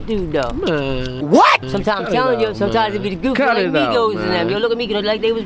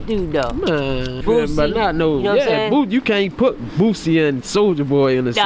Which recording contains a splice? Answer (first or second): second